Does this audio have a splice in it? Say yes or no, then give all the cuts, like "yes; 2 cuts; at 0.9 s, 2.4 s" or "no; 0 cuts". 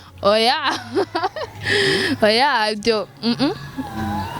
no; 0 cuts